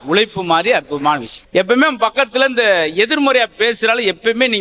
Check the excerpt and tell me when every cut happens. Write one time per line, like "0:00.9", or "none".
0:01.3